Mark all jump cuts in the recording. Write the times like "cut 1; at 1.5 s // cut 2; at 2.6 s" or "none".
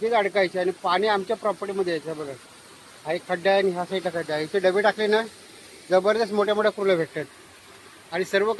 none